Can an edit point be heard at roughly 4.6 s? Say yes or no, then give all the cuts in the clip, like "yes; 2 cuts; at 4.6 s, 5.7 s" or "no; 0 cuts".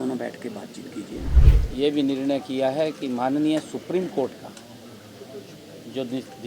no; 1 cut; at 1.4 s